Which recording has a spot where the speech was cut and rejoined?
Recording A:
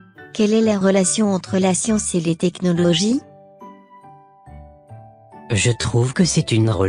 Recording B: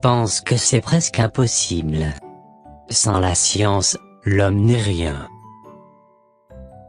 A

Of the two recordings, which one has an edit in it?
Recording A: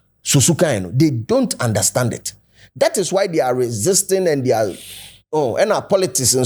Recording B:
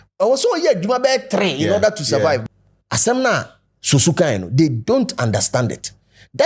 B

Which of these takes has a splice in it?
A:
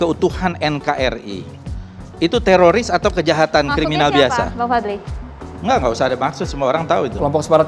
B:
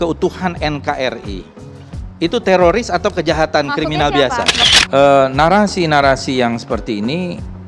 B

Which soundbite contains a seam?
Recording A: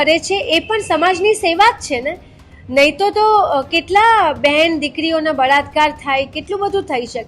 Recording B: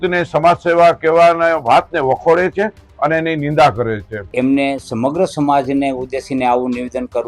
B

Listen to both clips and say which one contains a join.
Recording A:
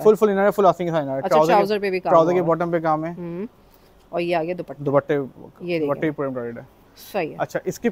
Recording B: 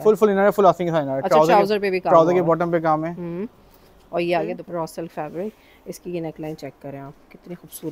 B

